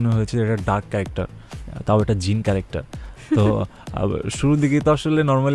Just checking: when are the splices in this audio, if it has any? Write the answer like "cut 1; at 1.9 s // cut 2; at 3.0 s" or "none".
none